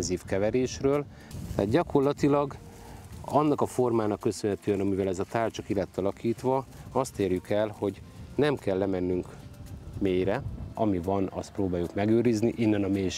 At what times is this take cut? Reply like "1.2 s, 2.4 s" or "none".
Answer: 1.2 s, 10.6 s